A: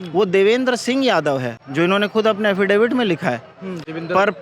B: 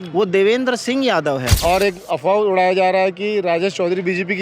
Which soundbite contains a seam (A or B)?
B